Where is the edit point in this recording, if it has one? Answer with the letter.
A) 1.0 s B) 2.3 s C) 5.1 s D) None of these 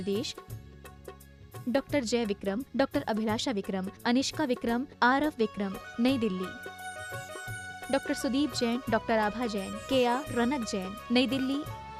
D